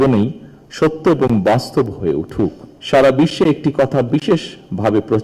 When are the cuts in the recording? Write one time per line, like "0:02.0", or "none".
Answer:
0:02.7